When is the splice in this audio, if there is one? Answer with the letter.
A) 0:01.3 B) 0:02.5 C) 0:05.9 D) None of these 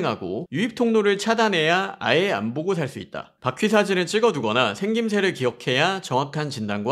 D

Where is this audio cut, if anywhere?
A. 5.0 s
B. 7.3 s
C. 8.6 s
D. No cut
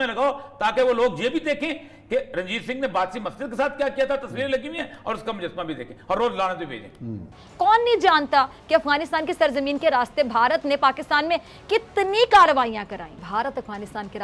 D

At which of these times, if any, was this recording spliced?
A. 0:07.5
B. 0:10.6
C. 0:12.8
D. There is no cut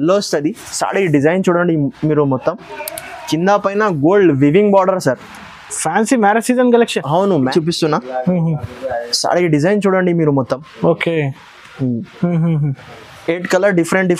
A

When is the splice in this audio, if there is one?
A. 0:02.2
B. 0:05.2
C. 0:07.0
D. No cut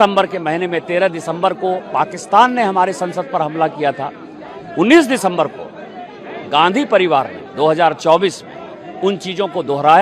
D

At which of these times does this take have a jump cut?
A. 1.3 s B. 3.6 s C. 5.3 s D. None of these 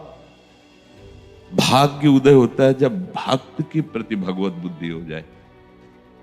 C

